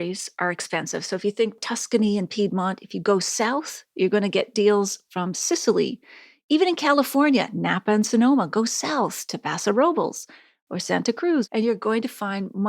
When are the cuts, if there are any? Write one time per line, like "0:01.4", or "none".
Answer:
0:01.6
0:11.4